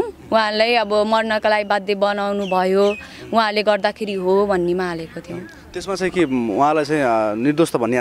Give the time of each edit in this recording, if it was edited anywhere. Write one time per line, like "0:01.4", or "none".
none